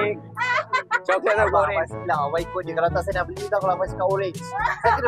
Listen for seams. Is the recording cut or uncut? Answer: uncut